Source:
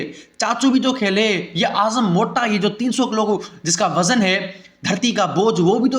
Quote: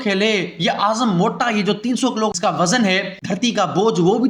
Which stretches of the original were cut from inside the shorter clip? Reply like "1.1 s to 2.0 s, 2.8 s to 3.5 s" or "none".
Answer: 3.3 s to 3.7 s, 4.5 s to 4.8 s